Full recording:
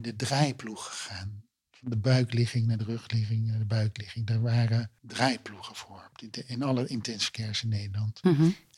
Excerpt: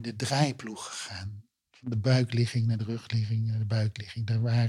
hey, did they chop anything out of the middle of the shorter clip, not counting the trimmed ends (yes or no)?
no